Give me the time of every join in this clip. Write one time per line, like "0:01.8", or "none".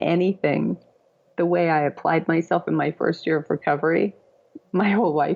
none